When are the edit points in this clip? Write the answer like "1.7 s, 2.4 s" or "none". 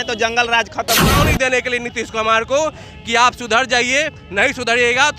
1.1 s